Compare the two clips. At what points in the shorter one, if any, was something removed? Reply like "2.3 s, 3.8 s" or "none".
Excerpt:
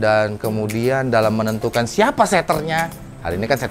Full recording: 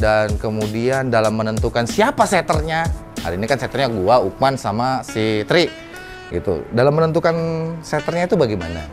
none